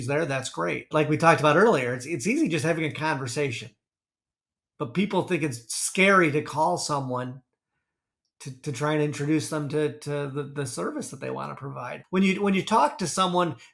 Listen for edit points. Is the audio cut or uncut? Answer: cut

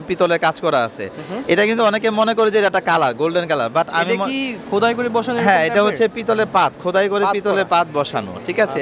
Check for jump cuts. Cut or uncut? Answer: uncut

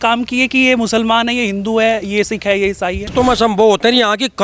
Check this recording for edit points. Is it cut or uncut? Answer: cut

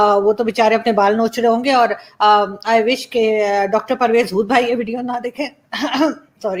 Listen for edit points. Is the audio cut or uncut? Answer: uncut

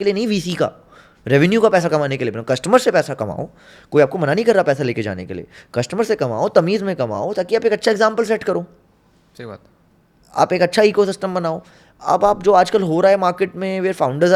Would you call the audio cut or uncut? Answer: uncut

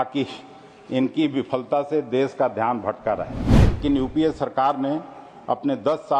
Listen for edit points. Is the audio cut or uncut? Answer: cut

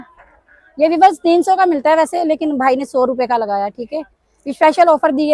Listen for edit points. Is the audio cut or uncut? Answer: uncut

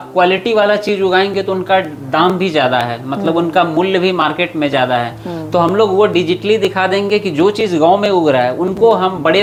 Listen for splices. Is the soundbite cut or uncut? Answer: uncut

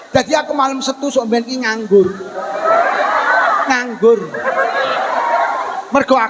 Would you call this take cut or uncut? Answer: uncut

